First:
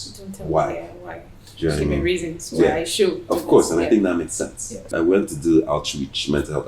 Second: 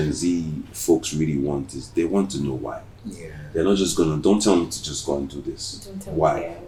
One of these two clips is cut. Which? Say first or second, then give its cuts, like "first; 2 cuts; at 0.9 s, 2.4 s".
first; 1 cut; at 4.9 s